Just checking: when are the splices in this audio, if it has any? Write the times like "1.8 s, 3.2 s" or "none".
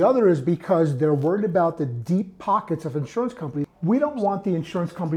3.7 s